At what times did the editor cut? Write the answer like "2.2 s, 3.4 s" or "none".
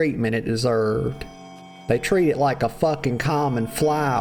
none